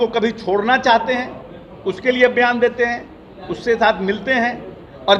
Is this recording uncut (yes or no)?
yes